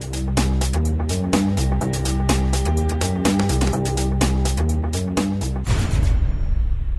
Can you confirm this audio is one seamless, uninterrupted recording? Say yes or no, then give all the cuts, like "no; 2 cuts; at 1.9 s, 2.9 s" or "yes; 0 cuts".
no; 1 cut; at 5.7 s